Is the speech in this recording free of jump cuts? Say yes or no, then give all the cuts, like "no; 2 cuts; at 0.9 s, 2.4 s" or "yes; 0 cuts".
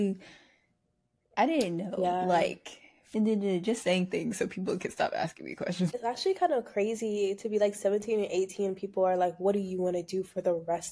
no; 2 cuts; at 2.9 s, 6.0 s